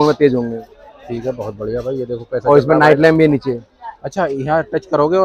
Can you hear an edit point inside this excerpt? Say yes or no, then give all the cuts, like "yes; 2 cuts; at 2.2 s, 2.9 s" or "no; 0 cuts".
no; 0 cuts